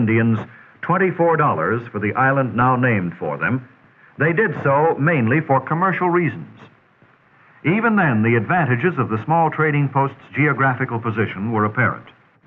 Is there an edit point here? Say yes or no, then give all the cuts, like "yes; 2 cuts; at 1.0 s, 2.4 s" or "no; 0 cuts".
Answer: no; 0 cuts